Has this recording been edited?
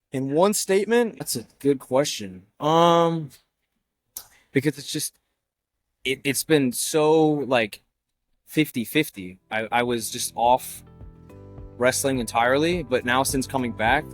yes; 1 cut; at 1.2 s

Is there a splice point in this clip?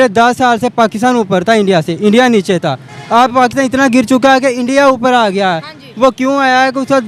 no; 0 cuts

